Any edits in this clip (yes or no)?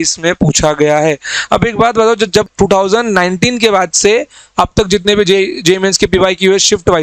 yes